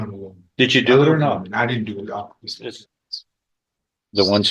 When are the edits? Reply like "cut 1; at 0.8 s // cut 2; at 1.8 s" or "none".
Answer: cut 1; at 2.4 s